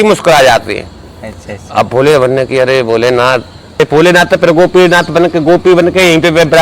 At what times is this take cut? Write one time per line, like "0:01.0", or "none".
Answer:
0:03.8